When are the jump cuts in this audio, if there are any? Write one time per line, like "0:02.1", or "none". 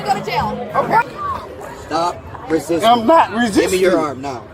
0:01.0

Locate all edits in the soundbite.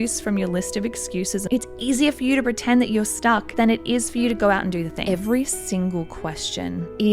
0:01.5
0:05.0

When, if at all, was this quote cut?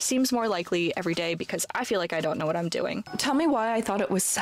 0:03.1

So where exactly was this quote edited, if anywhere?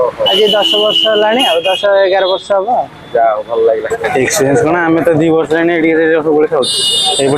0:04.0

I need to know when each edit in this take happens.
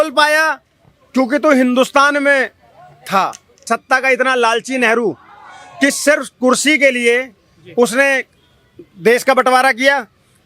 0:03.6

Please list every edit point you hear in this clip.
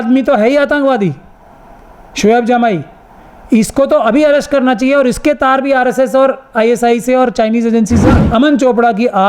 0:08.2

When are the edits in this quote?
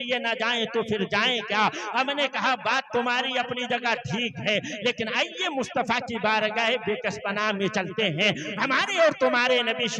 none

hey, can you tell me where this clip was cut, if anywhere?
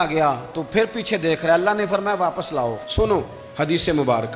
0:02.8

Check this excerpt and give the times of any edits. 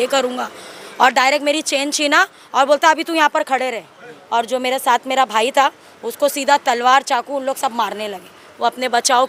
none

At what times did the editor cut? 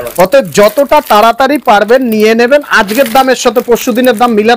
none

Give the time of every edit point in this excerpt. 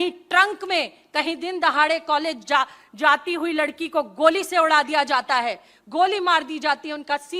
none

